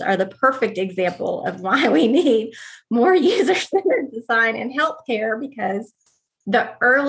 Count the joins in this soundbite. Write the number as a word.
zero